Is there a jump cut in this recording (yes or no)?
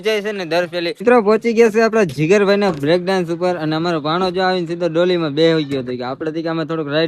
yes